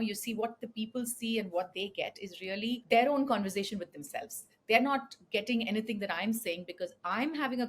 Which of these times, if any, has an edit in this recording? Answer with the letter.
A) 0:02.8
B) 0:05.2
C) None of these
A